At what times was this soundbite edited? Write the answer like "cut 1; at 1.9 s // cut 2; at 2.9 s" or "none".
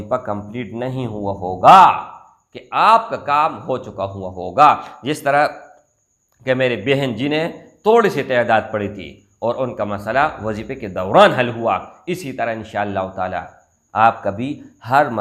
none